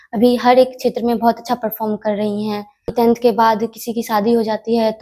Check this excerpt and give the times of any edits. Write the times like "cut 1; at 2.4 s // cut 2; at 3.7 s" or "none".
cut 1; at 2.9 s